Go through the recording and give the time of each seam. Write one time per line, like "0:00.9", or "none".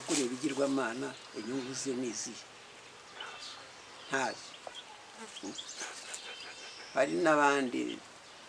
none